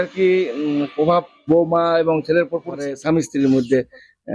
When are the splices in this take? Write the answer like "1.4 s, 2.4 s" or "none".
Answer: 1.4 s, 3.0 s